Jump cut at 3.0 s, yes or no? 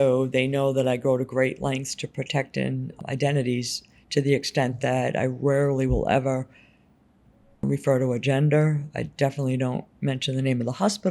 yes